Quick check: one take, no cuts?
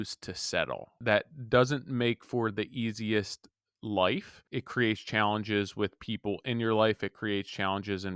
no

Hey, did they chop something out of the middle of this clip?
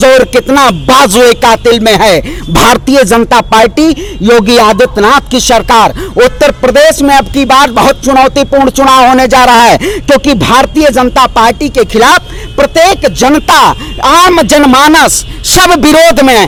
no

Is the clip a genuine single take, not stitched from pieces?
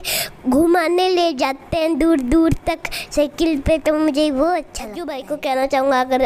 no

